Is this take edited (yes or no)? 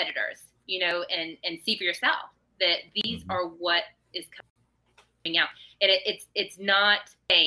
no